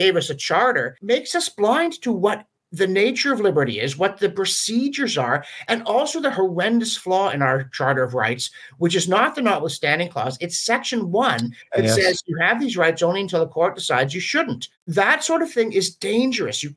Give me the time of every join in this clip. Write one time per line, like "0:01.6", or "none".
0:01.0